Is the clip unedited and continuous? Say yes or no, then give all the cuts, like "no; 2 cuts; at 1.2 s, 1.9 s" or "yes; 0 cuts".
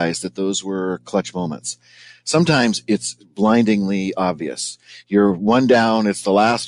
yes; 0 cuts